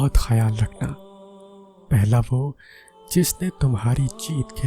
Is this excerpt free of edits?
yes; 0 cuts

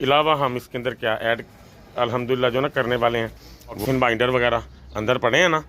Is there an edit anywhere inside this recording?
yes; 1 cut; at 3.8 s

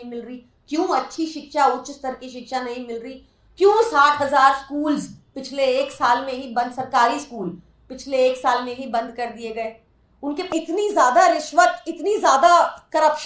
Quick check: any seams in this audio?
yes; 1 cut; at 10.5 s

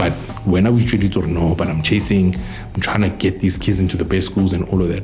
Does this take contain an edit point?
no; 0 cuts

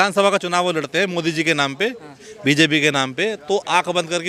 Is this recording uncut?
yes; 0 cuts

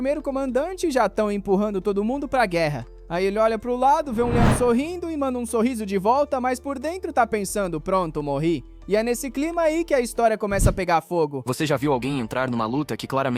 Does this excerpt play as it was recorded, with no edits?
no; 1 cut; at 11.4 s

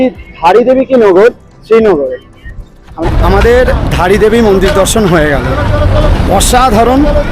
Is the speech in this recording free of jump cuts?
no; 1 cut; at 3.0 s

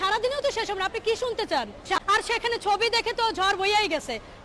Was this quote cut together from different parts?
no; 0 cuts

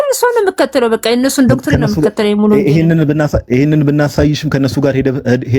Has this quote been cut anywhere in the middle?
no; 0 cuts

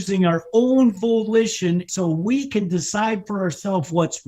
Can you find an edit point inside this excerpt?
yes; 1 cut; at 1.9 s

